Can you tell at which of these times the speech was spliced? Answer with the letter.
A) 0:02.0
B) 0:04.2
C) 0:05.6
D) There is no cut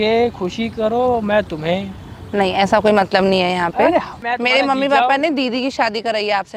B